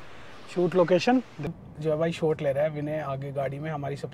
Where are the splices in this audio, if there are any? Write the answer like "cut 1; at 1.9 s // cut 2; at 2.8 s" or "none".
cut 1; at 1.6 s